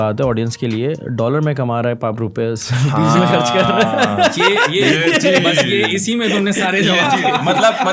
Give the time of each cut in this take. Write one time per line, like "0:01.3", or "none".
none